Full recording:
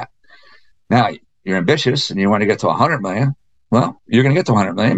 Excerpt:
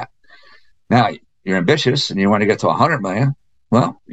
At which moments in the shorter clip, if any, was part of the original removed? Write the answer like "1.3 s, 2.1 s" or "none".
none